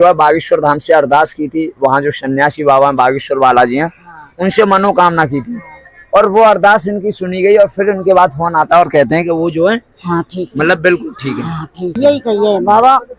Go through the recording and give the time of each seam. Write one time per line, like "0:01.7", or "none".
0:12.0